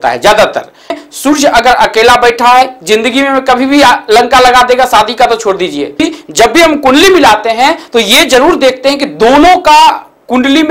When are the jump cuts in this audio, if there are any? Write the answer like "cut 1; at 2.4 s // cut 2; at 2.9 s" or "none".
cut 1; at 0.9 s // cut 2; at 6.0 s